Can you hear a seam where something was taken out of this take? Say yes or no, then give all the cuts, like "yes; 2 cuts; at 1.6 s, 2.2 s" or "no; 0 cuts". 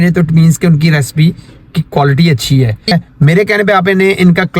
yes; 1 cut; at 2.9 s